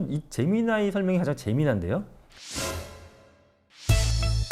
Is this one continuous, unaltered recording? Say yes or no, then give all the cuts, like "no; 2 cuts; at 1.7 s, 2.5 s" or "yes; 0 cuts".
yes; 0 cuts